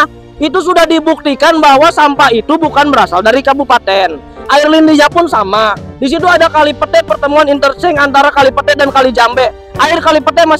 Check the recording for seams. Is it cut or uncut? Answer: uncut